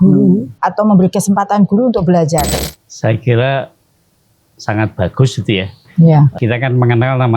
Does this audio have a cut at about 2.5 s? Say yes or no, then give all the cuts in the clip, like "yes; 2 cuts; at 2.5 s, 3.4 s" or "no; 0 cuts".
yes; 1 cut; at 2.5 s